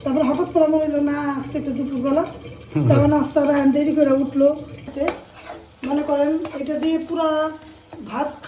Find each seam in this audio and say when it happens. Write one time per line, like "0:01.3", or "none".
0:04.9